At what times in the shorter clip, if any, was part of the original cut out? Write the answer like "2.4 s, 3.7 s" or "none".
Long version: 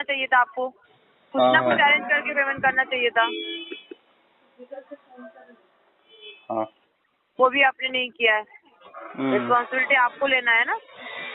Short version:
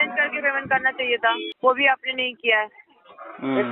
1.5 s